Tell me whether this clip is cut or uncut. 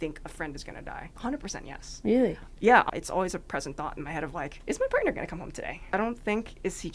cut